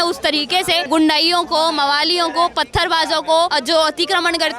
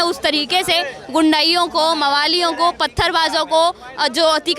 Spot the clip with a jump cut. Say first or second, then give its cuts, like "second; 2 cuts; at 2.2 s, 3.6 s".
first; 2 cuts; at 0.8 s, 3.5 s